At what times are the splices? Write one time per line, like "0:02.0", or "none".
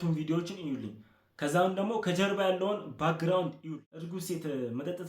0:03.6